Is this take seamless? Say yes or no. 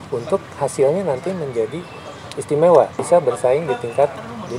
no